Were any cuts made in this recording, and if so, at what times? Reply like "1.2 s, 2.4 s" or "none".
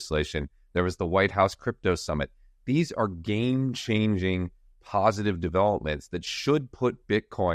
none